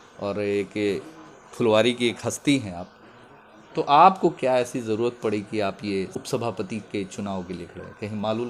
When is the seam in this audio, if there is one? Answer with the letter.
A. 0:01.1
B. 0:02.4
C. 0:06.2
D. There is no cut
C